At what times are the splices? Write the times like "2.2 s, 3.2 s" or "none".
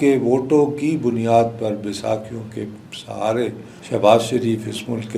3.7 s